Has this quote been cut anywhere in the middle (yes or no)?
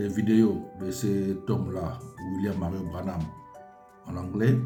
no